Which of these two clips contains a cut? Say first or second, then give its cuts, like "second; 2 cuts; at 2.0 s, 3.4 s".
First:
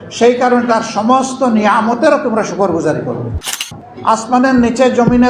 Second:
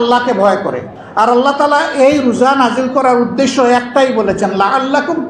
first; 1 cut; at 3.6 s